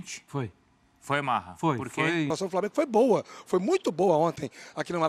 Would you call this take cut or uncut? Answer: cut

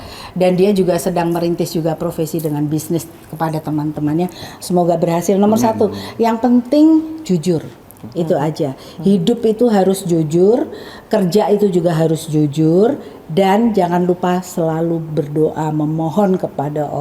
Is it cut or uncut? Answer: uncut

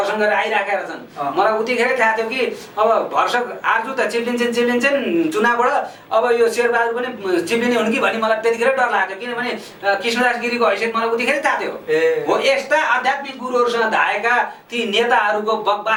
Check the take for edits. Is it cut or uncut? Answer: uncut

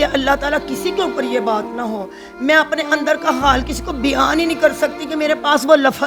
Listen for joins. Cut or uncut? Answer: uncut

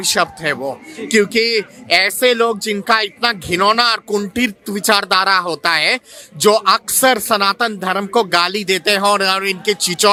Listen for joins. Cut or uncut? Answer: uncut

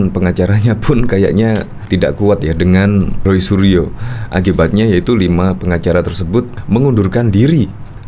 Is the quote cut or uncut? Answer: cut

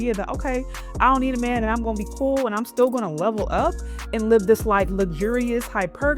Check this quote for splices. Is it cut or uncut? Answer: uncut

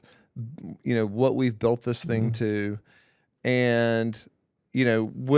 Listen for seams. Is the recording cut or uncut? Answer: uncut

